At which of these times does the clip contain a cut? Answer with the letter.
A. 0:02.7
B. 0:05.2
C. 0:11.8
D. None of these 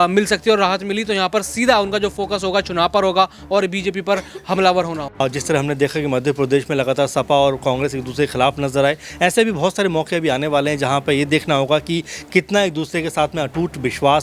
B